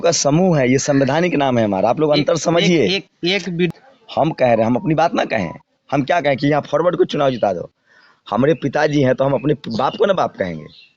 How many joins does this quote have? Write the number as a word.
one